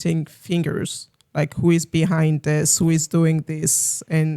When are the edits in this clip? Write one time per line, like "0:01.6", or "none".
none

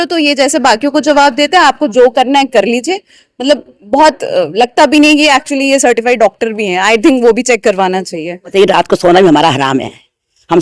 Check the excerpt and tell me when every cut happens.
0:08.5

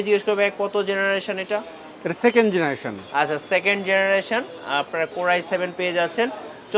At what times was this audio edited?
none

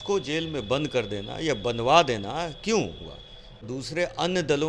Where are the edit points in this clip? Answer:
0:03.7

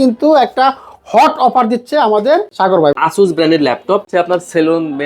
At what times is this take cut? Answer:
0:02.8
0:04.1

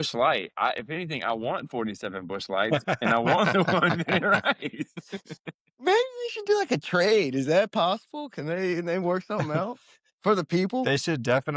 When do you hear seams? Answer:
none

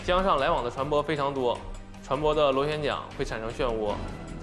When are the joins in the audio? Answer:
none

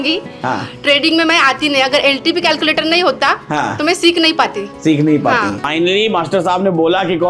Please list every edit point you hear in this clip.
0:05.7

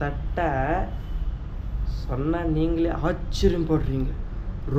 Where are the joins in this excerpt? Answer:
none

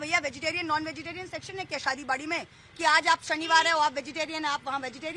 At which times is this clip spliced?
none

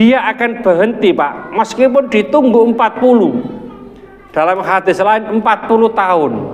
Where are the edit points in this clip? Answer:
none

